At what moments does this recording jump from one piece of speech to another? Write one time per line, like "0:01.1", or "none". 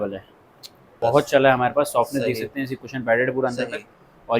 0:00.9